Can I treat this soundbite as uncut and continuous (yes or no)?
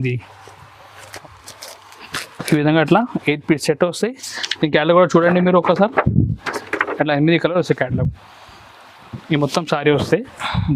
no